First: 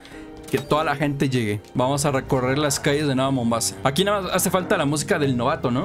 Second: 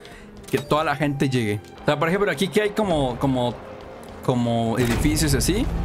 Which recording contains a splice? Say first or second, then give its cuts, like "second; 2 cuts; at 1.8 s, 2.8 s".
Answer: first; 2 cuts; at 1.6 s, 3.7 s